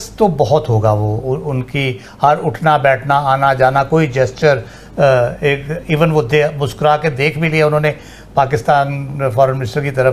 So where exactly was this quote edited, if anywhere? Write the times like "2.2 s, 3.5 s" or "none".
none